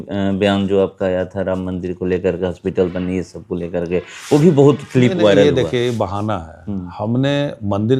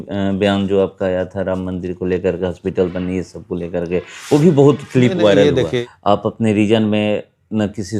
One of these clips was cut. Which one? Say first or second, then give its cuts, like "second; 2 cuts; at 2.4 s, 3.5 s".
second; 1 cut; at 5.8 s